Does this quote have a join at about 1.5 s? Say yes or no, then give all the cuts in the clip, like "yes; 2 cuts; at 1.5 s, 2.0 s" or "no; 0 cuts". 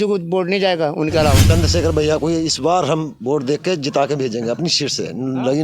yes; 1 cut; at 1.5 s